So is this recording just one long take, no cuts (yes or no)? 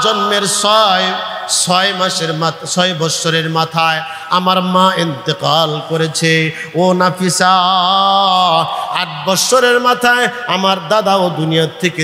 yes